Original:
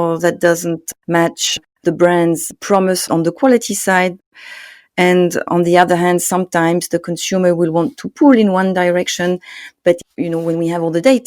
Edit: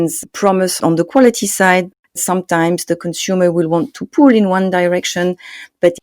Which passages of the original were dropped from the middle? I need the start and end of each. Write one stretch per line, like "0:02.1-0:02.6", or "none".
0:04.5-0:06.3